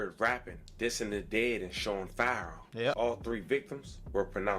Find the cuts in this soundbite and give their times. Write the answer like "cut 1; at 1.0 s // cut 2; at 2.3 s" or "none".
cut 1; at 3.0 s